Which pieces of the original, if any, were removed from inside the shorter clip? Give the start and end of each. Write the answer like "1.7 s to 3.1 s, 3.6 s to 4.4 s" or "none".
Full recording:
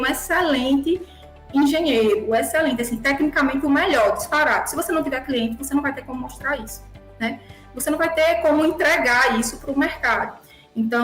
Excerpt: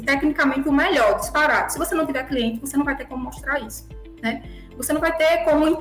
none